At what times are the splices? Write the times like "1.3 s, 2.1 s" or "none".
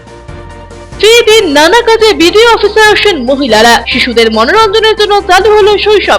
1.0 s